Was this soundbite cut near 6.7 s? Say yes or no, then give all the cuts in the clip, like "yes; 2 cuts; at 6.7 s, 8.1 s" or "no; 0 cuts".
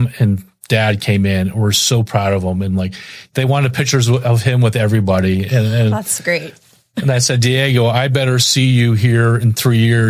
no; 0 cuts